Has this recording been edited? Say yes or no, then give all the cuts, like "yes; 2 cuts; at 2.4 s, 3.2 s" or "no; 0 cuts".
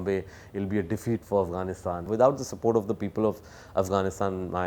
yes; 1 cut; at 2.0 s